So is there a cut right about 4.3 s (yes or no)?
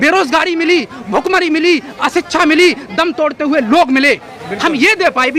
yes